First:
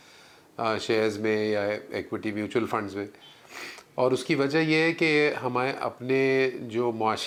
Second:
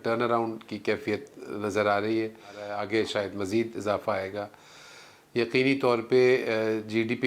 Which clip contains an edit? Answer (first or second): second